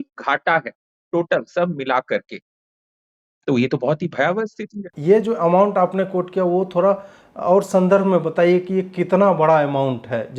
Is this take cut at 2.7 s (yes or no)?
no